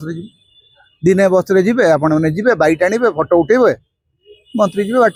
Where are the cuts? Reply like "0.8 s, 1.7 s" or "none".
none